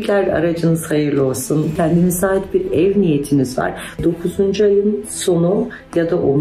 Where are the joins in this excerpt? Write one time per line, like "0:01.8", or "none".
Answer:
0:01.7
0:04.0